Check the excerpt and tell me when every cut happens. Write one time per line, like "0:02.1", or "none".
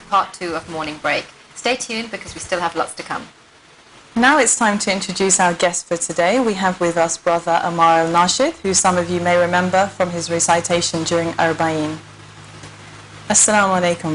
none